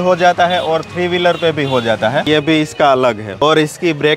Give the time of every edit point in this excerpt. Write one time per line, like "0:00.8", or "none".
0:02.3